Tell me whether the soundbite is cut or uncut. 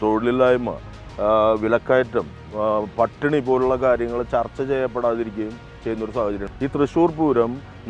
cut